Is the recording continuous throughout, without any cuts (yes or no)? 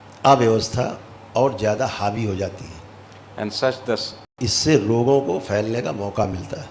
yes